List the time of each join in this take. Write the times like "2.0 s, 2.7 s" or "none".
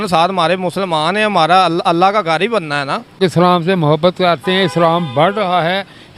3.2 s